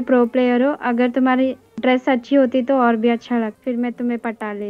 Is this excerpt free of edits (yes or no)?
no